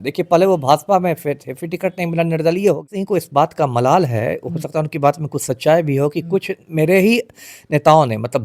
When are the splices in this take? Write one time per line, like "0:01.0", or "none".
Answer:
0:02.9